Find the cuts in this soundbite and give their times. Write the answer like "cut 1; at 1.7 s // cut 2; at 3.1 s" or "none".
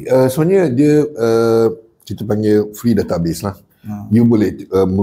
none

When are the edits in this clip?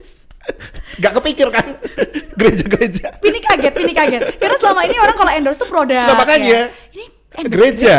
none

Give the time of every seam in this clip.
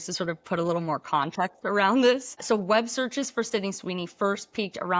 cut 1; at 2.4 s

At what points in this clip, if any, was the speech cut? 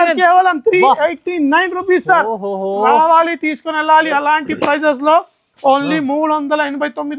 none

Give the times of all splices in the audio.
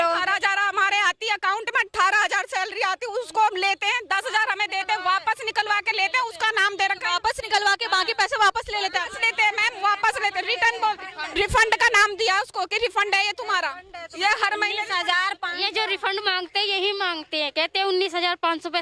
none

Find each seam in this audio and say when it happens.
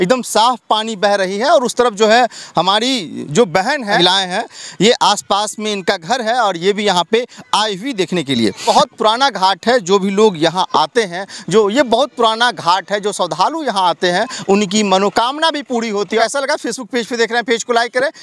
none

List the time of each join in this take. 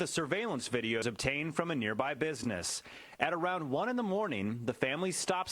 cut 1; at 1.0 s

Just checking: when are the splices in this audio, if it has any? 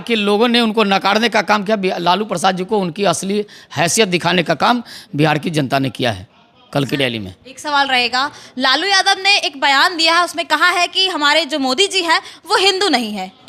none

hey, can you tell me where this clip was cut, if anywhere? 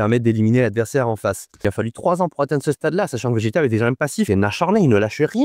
cut 1; at 1.6 s // cut 2; at 4.3 s

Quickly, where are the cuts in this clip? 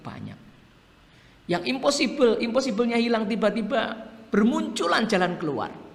none

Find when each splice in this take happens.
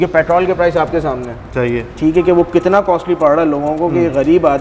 none

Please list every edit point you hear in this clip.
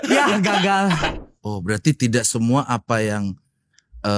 cut 1; at 1.0 s

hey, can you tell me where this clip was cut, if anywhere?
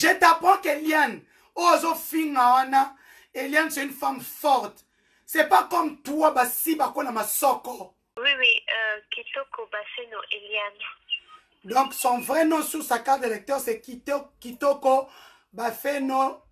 cut 1; at 8.0 s

